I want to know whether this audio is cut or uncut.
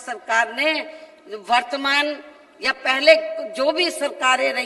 uncut